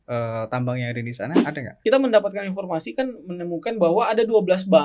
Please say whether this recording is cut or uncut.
cut